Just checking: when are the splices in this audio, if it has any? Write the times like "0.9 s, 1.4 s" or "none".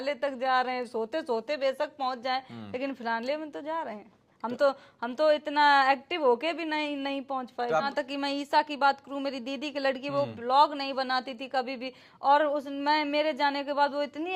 7.9 s